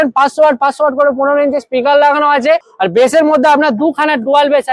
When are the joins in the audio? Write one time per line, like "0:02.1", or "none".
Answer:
0:02.7